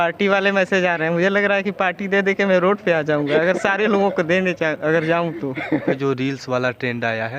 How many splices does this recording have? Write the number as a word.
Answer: one